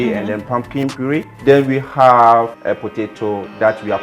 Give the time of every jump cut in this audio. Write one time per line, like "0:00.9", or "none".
0:01.3
0:02.6